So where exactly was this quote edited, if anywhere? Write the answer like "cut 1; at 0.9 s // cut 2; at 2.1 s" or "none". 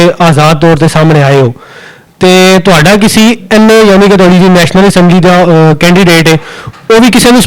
none